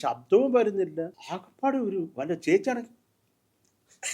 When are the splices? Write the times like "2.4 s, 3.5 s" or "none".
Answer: 1.1 s